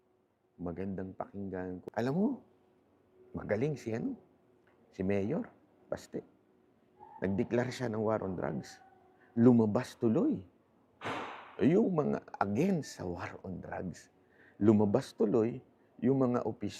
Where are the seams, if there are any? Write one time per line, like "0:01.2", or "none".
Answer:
0:01.8

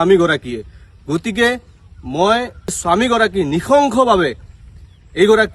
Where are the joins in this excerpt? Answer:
0:02.8

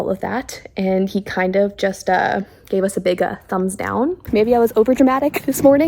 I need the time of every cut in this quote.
0:04.3

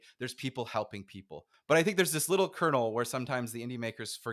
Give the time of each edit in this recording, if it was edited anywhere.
0:01.5

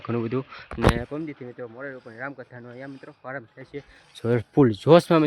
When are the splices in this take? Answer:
none

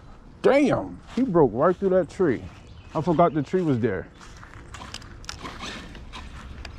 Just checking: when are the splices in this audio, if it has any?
none

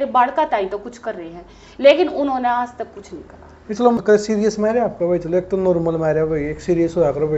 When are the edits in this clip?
0:04.0

